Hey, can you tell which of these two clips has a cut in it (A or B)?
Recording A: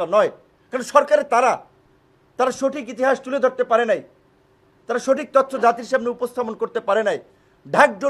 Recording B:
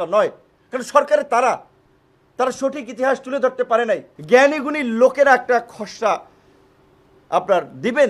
B